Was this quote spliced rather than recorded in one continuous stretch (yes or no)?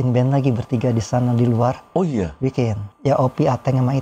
yes